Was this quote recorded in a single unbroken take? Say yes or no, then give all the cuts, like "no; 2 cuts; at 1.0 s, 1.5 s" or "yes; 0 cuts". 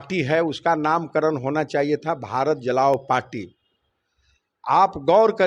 yes; 0 cuts